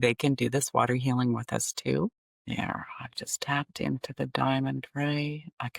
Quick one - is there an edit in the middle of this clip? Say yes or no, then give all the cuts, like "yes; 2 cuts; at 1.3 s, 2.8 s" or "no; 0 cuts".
yes; 1 cut; at 2.2 s